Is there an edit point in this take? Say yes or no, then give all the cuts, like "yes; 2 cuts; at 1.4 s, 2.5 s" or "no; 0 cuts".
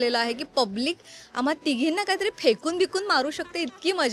no; 0 cuts